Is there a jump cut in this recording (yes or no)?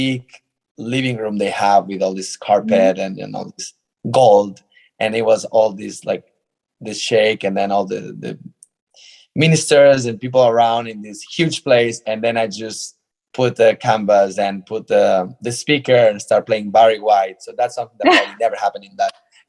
no